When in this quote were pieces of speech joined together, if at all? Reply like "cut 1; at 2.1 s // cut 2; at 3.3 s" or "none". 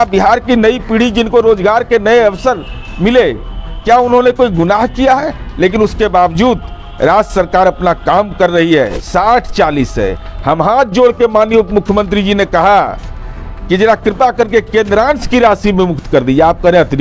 cut 1; at 9.0 s